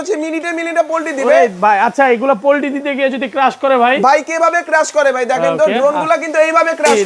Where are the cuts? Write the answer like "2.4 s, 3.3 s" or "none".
none